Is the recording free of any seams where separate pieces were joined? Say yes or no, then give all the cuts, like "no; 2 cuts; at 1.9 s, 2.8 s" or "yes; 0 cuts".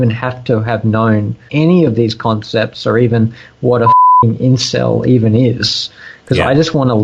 no; 1 cut; at 1.4 s